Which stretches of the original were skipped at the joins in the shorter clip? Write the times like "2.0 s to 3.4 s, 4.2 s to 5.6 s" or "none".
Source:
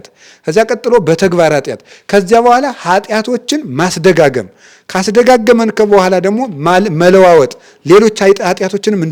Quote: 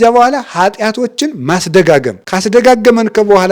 4.5 s to 4.8 s